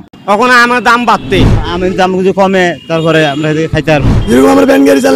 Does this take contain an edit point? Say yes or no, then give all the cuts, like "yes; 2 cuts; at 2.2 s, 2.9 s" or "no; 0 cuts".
yes; 2 cuts; at 1.6 s, 4.1 s